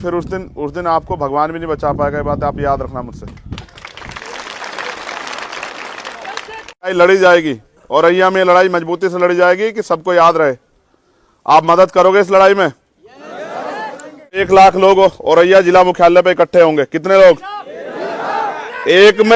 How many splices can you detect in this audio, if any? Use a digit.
2